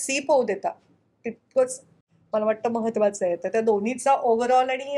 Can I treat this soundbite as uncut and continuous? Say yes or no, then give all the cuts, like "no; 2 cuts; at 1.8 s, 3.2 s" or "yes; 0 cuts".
yes; 0 cuts